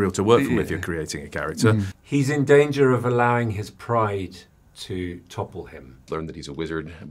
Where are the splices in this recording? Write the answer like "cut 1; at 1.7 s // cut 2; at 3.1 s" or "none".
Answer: cut 1; at 1.9 s // cut 2; at 6.0 s